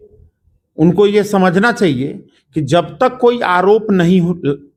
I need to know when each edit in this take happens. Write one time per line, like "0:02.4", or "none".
none